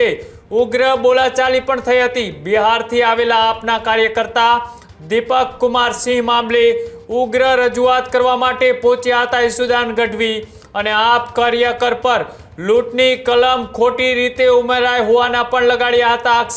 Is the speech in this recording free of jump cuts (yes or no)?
yes